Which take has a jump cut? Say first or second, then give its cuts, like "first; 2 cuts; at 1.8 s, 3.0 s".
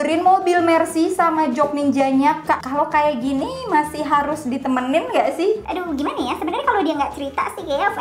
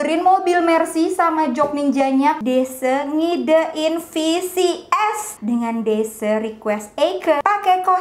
second; 2 cuts; at 2.4 s, 5.3 s